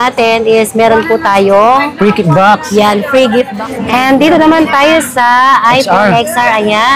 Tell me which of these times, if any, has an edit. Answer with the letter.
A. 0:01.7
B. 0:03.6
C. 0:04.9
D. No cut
B